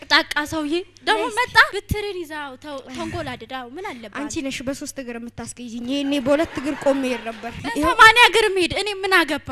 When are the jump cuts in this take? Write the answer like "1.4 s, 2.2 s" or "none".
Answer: 1.7 s, 7.6 s